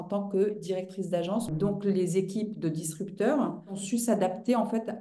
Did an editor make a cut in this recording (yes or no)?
yes